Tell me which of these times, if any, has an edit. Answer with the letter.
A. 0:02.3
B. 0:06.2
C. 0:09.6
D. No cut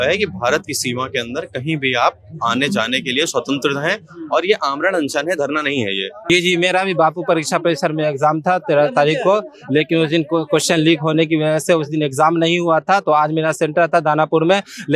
B